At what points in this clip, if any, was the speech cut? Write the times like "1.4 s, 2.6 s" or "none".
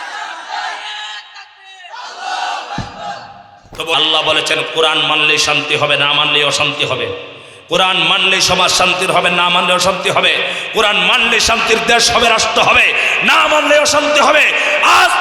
3.9 s